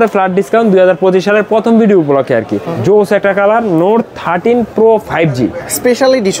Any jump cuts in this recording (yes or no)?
yes